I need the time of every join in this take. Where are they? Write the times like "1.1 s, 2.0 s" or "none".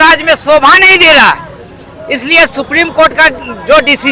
none